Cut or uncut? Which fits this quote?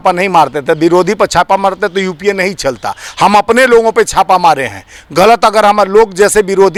uncut